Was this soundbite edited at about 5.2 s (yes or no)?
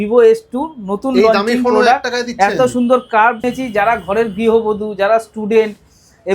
no